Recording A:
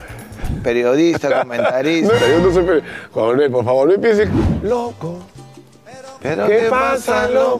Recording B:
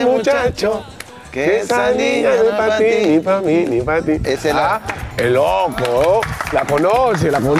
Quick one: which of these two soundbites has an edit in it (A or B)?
A